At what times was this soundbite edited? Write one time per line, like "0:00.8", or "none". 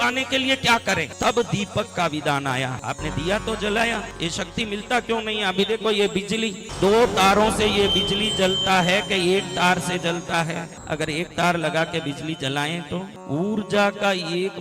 0:01.1
0:02.7
0:04.1
0:06.6
0:10.7
0:13.2